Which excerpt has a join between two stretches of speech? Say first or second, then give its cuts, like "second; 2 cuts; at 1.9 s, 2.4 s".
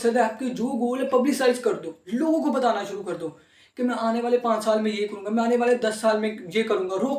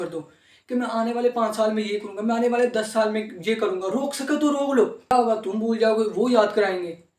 second; 1 cut; at 5.1 s